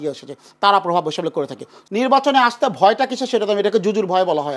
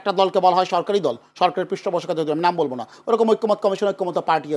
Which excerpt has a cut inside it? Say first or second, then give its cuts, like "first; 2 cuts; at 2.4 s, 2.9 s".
first; 1 cut; at 1.7 s